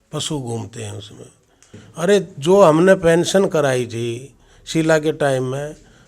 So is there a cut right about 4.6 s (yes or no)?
no